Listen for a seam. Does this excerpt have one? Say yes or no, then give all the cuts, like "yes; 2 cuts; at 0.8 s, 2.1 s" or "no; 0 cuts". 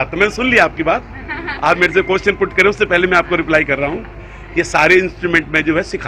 no; 0 cuts